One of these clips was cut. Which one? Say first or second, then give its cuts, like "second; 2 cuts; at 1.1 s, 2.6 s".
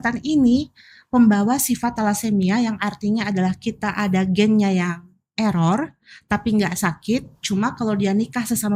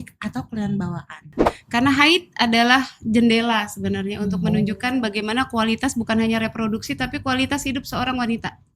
second; 1 cut; at 1.5 s